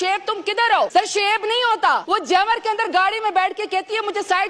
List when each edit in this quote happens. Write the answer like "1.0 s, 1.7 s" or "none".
0.9 s, 2.0 s